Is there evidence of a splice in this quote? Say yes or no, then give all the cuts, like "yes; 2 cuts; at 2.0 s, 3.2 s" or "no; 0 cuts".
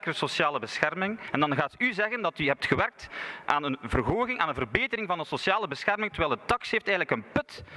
yes; 1 cut; at 1.2 s